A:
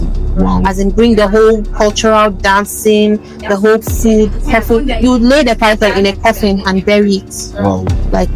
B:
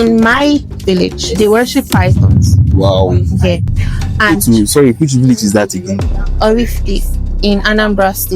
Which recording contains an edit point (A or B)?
B